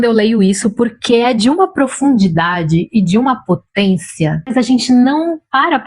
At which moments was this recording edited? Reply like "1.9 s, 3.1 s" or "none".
4.5 s